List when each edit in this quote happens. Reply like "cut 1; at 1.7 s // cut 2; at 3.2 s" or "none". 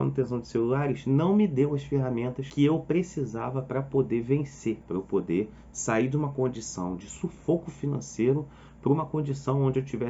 cut 1; at 2.4 s // cut 2; at 4.8 s